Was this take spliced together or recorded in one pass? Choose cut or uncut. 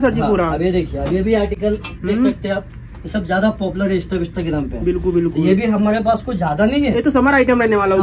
uncut